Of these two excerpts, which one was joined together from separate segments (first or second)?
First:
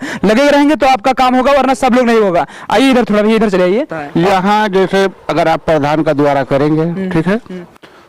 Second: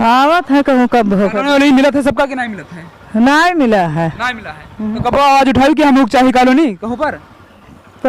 first